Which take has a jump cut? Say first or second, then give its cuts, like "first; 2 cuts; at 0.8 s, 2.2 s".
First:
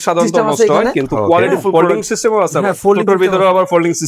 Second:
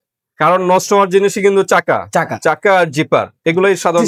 first; 1 cut; at 1.7 s